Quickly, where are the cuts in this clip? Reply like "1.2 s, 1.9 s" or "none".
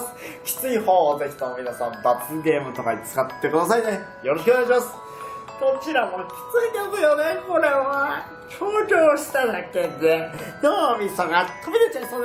6.1 s